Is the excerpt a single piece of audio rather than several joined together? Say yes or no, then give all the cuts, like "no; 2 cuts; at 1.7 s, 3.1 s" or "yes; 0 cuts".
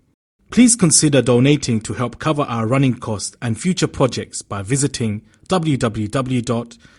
yes; 0 cuts